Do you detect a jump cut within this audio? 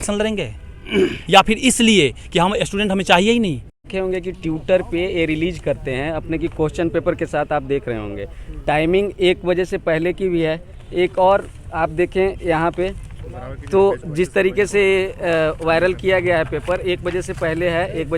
yes; 1 cut; at 3.8 s

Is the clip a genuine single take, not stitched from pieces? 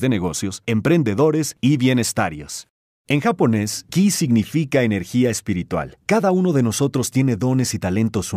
no; 1 cut; at 5.7 s

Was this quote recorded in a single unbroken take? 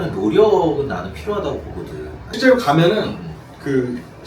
no; 1 cut; at 2.3 s

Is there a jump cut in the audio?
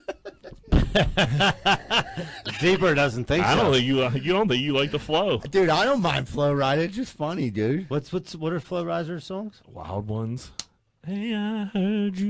no; 0 cuts

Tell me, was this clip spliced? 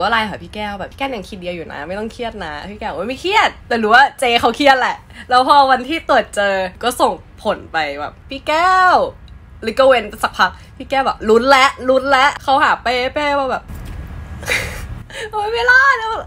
yes; 5 cuts; at 0.9 s, 6.7 s, 8.2 s, 12.3 s, 13.7 s

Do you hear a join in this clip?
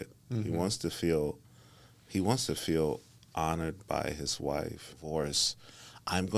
yes; 1 cut; at 5.0 s

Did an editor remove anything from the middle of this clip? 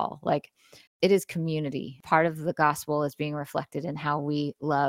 yes; 1 cut; at 2.0 s

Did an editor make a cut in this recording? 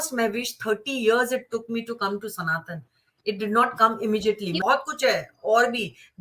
yes; 1 cut; at 4.6 s

